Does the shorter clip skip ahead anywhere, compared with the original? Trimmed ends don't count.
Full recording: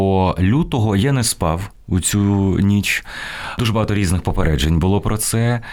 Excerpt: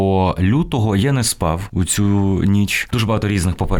yes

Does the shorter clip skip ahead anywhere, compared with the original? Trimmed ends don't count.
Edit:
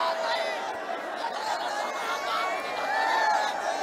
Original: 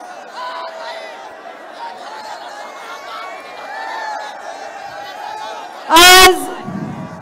yes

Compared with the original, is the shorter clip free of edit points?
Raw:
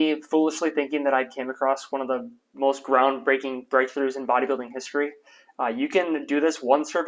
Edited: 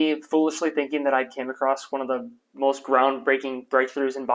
yes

